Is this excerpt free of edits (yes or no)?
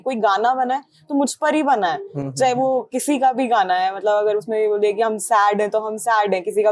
yes